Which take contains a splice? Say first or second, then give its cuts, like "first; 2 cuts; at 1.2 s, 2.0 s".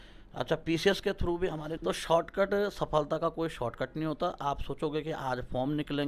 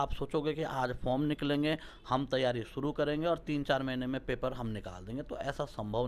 first; 1 cut; at 1.7 s